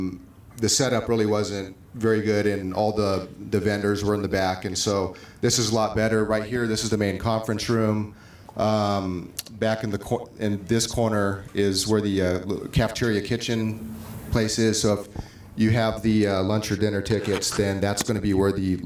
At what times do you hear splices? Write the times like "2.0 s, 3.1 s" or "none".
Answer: none